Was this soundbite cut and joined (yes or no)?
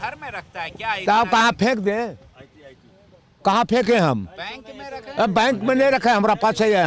no